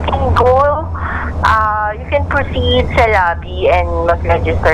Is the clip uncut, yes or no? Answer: yes